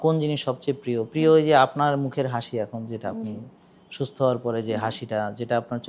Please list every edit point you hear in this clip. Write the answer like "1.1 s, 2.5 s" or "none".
none